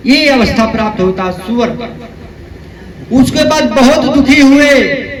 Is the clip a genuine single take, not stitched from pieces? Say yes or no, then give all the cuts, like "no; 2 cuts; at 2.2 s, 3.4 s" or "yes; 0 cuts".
yes; 0 cuts